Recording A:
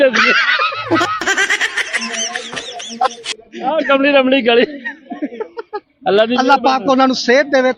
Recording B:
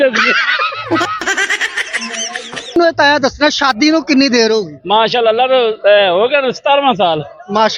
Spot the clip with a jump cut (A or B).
B